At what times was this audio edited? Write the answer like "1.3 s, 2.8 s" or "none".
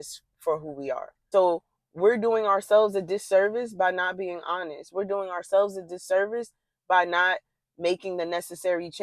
1.1 s

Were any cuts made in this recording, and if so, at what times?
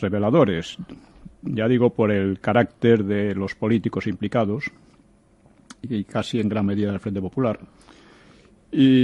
5.9 s

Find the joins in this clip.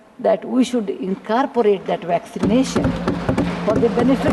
none

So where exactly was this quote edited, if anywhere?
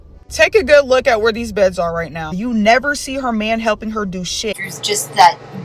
2.3 s, 4.7 s

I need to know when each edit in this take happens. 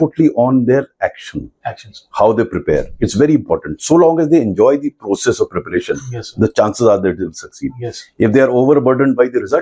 none

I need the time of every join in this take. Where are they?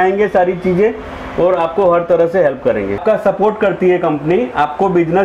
3.0 s

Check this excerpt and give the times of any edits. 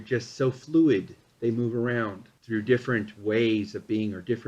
2.3 s

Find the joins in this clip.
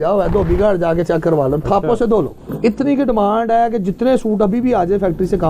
2.4 s

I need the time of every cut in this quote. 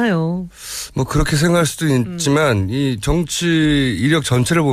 none

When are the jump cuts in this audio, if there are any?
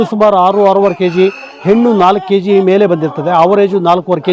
none

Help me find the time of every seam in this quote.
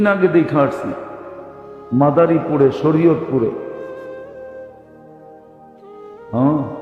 3.7 s, 5.8 s

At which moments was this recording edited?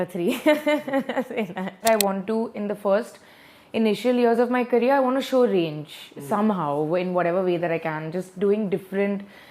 1.8 s

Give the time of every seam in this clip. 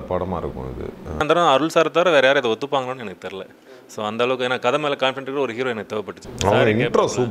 1.2 s, 6.2 s

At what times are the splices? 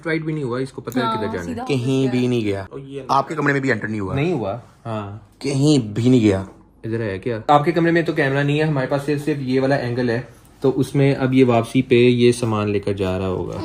none

